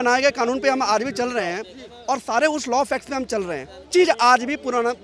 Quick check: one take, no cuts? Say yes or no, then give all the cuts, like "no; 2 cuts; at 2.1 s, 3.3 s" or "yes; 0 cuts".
no; 1 cut; at 3.9 s